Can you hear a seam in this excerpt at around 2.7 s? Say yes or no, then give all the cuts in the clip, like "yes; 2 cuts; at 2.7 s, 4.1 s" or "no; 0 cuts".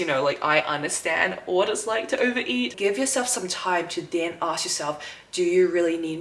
yes; 1 cut; at 2.7 s